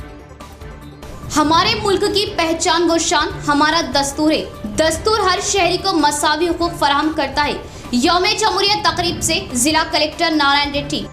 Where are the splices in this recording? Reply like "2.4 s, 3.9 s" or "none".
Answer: 1.0 s

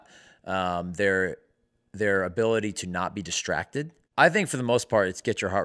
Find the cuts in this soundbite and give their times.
4.0 s

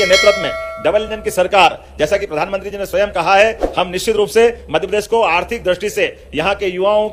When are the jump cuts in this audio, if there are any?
none

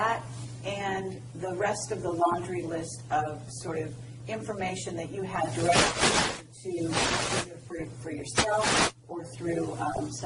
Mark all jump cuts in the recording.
none

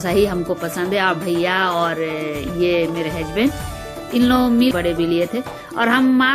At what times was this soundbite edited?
4.7 s

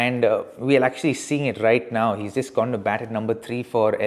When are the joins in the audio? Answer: none

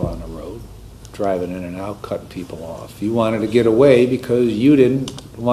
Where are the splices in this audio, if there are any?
none

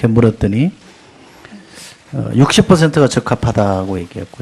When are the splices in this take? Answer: 2.7 s

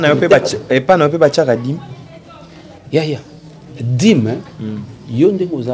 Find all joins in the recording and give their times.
none

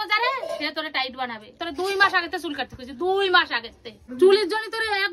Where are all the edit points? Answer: 1.6 s, 4.0 s

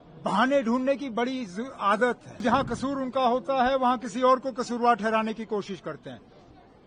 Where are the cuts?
2.4 s

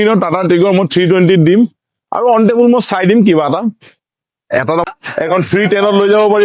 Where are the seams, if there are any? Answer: 4.8 s

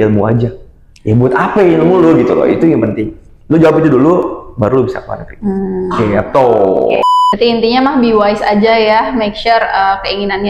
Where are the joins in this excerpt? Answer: 7.0 s

